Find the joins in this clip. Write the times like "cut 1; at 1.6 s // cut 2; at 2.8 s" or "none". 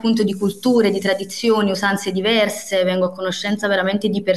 none